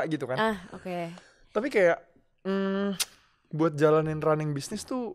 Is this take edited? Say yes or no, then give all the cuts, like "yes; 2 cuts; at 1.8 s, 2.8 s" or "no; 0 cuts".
no; 0 cuts